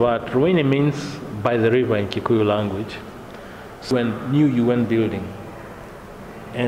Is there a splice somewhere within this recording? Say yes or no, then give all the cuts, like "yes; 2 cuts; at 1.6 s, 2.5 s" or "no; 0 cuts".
yes; 1 cut; at 3.9 s